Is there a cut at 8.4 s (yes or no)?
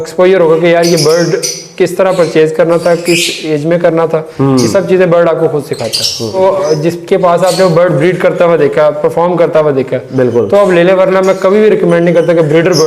no